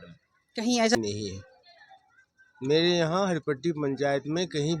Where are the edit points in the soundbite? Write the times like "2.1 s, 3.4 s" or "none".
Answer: 0.9 s